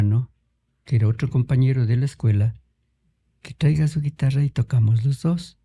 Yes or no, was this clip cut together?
no